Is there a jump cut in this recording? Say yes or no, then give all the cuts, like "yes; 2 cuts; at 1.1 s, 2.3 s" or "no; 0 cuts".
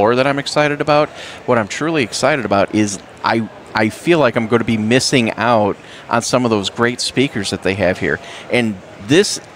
no; 0 cuts